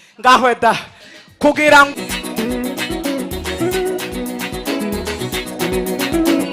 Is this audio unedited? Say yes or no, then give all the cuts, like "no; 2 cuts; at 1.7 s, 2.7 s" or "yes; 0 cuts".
no; 1 cut; at 1.9 s